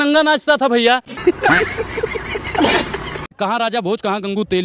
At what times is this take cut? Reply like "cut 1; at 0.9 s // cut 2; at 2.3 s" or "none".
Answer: cut 1; at 1.1 s // cut 2; at 3.2 s